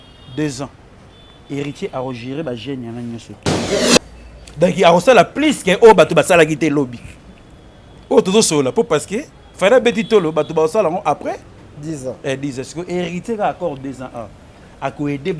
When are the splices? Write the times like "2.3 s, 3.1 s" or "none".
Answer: 3.7 s

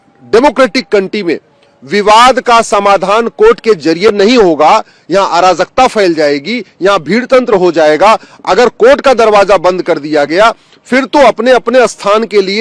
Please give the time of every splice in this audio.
none

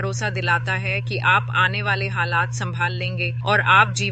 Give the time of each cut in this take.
none

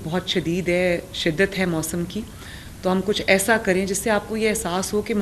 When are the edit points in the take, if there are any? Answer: none

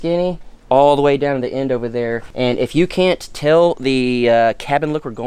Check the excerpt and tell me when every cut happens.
2.2 s

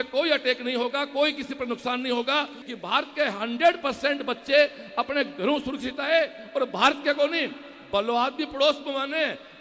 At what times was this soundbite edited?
2.6 s

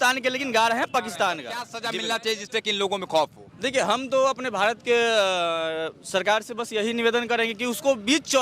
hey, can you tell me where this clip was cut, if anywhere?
1.8 s

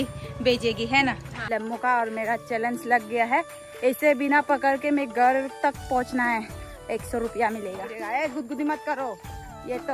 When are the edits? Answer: 1.3 s, 7.9 s

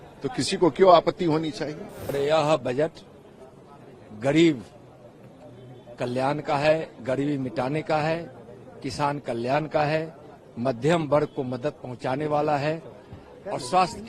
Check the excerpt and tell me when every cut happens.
2.1 s

